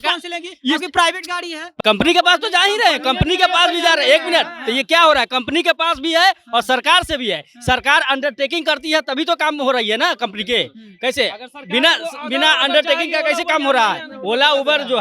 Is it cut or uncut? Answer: cut